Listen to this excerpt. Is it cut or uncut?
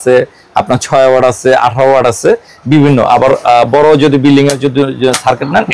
uncut